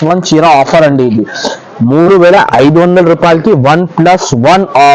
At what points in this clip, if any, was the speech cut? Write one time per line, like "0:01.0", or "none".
none